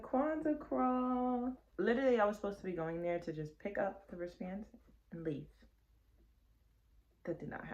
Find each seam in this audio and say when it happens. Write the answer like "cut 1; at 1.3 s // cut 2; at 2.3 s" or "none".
cut 1; at 1.6 s